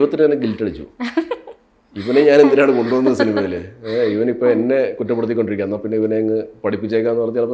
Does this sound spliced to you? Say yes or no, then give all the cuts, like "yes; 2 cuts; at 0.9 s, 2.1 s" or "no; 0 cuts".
no; 0 cuts